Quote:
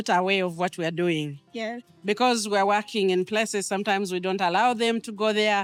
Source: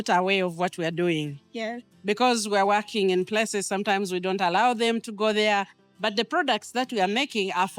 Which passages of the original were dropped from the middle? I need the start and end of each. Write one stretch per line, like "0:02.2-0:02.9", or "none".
none